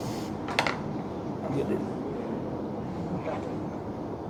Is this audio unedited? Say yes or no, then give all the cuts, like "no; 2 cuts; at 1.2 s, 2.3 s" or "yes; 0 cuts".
yes; 0 cuts